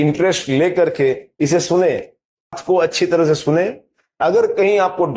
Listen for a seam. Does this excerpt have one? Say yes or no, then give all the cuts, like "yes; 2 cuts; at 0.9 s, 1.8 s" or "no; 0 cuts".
yes; 1 cut; at 2.6 s